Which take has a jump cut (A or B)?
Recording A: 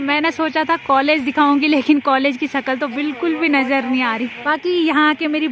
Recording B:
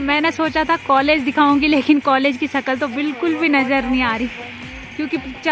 A